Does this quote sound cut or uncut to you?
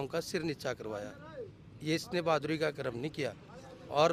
uncut